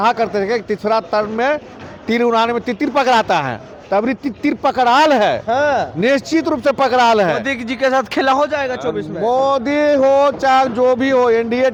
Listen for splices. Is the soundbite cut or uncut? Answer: uncut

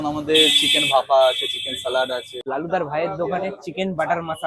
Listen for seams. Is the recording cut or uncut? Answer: cut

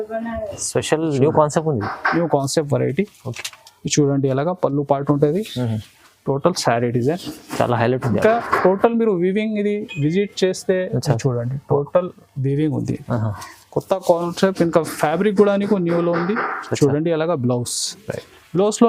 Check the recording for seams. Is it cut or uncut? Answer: uncut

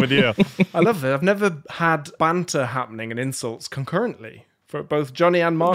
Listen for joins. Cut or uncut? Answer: cut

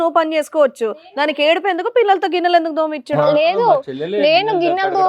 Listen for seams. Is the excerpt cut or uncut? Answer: uncut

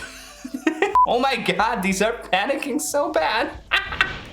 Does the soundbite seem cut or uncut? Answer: cut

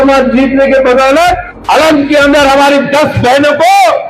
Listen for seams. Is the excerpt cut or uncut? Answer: cut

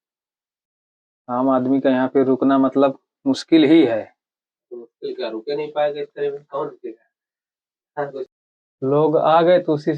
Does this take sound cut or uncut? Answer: cut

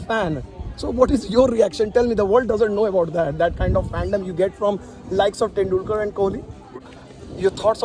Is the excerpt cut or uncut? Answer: cut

